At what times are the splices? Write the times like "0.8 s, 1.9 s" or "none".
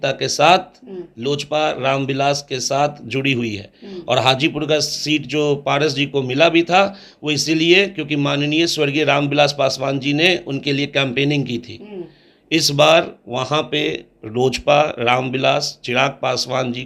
none